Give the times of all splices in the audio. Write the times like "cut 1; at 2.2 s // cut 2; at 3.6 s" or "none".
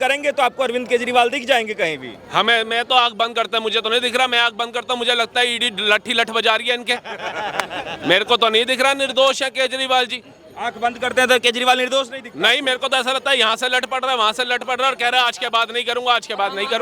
none